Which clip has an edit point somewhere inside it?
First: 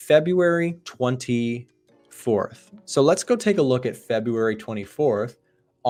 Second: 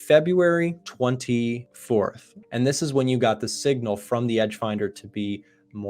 second; 1 cut; at 2.2 s

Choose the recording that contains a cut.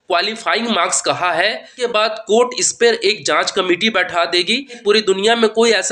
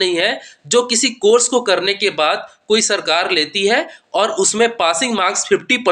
first; 2 cuts; at 1.8 s, 4.8 s

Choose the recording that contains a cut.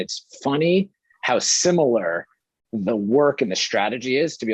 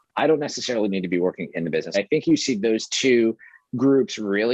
second; 1 cut; at 1.9 s

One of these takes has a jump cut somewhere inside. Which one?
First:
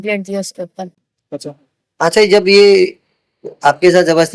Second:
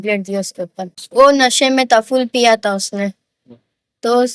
second; 1 cut; at 1.0 s

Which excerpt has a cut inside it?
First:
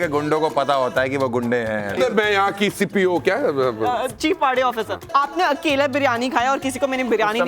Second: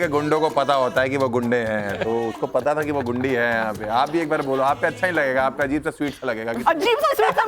first; 2 cuts; at 2.0 s, 5.1 s

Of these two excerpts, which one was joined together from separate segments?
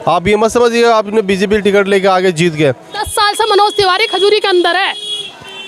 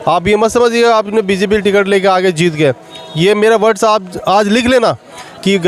first; 1 cut; at 3.0 s

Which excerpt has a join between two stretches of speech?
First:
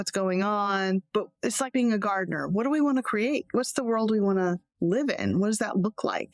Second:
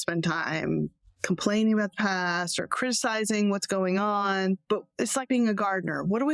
second; 1 cut; at 1.1 s

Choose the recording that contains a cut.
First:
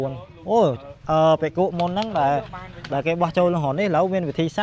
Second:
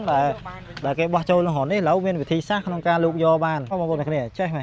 second; 1 cut; at 3.7 s

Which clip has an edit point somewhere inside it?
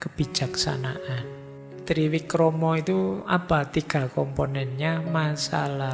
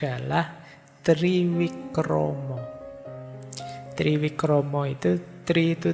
first; 1 cut; at 1.3 s

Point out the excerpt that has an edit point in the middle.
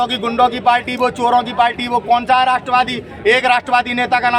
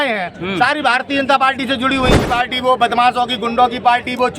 second; 1 cut; at 2.1 s

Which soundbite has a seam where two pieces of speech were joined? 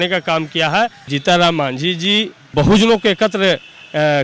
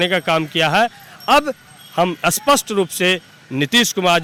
first; 2 cuts; at 1.1 s, 2.5 s

